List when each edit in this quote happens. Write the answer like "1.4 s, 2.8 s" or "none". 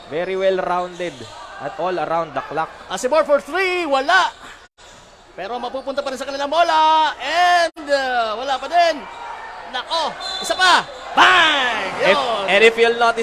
none